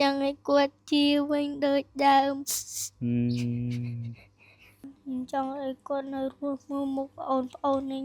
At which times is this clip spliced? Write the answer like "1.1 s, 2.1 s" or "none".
4.9 s